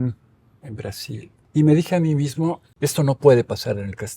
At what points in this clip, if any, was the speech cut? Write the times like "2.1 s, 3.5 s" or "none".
1.4 s, 2.7 s